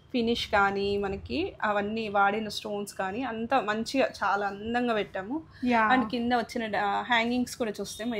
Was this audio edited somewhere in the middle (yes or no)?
no